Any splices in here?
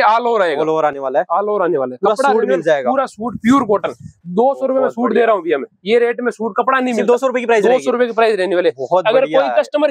no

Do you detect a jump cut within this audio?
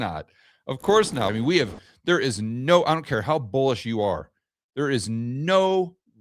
yes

